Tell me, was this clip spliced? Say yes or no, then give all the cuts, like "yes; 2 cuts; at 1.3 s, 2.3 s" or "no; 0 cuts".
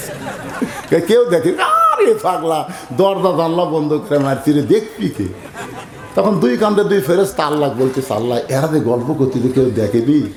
no; 0 cuts